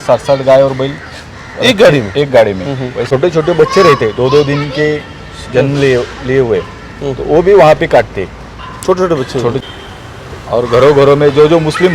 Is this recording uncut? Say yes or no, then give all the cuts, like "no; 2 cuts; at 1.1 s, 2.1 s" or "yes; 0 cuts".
no; 2 cuts; at 3.1 s, 9.6 s